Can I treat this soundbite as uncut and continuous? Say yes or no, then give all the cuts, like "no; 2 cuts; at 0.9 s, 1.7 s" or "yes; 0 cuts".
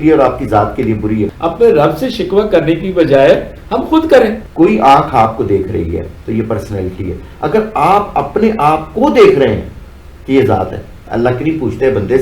no; 3 cuts; at 1.3 s, 4.4 s, 11.0 s